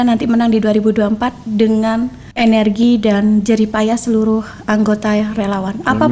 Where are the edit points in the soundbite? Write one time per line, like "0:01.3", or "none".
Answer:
none